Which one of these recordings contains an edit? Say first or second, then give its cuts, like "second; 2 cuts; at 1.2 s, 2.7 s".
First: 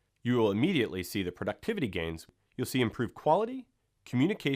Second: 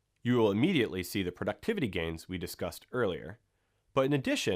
first; 1 cut; at 2.4 s